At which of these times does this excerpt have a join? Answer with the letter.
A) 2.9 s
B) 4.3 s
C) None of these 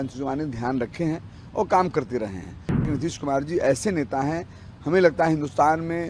A